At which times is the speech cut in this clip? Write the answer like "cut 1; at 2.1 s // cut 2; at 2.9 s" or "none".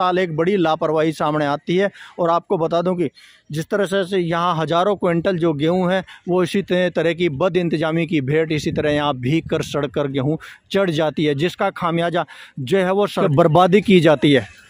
cut 1; at 13.2 s